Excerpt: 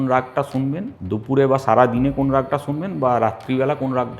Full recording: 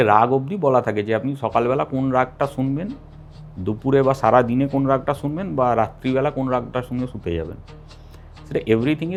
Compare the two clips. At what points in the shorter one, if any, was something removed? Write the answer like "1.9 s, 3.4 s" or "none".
0.9 s